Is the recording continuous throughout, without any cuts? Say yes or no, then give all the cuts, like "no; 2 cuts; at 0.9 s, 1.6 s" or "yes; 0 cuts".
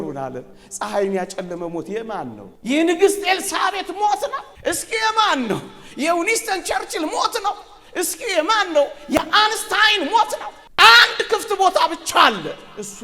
no; 3 cuts; at 2.5 s, 4.5 s, 10.6 s